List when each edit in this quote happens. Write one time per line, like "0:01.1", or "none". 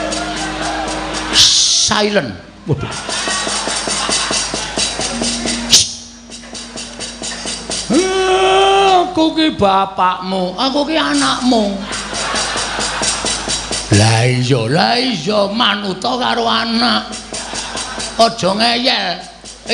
none